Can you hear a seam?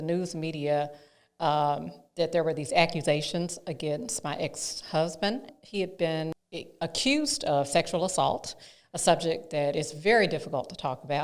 yes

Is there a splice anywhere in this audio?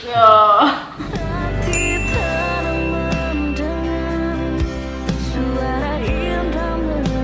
yes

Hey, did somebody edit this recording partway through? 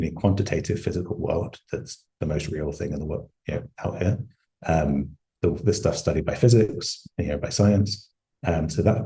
no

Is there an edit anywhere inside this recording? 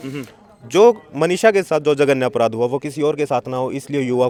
no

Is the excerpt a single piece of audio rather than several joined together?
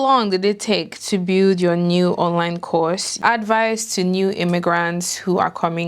no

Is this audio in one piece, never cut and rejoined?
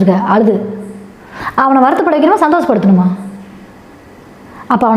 yes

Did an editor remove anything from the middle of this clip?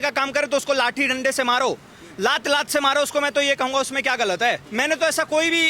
yes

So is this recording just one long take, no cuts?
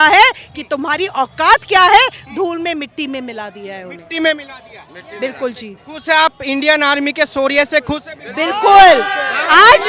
yes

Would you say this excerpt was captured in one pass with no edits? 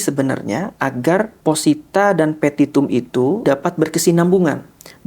no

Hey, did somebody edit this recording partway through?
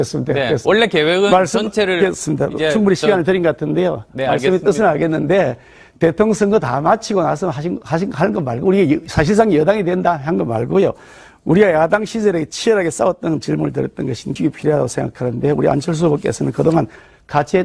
yes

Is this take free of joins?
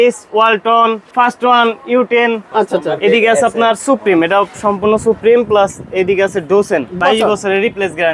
no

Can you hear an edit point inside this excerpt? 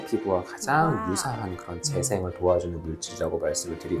no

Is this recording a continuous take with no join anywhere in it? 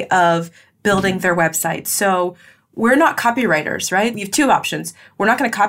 no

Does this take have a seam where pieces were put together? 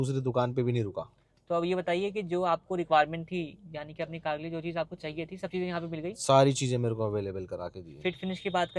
no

